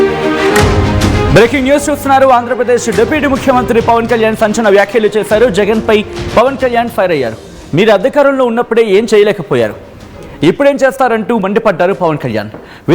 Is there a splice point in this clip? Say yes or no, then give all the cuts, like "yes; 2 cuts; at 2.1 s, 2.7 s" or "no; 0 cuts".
yes; 1 cut; at 1.2 s